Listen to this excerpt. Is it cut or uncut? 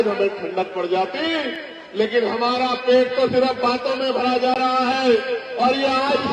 uncut